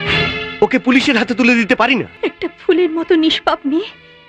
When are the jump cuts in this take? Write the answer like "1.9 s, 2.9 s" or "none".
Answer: 2.1 s